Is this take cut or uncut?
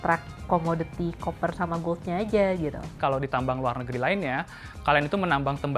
cut